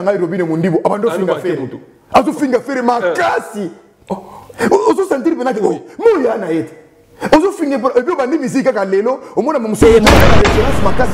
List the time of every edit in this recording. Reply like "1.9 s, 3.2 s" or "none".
none